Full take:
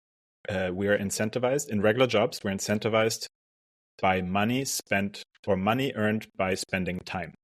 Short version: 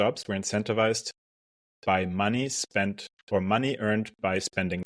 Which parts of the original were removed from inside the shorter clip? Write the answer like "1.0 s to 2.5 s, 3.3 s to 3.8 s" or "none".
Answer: none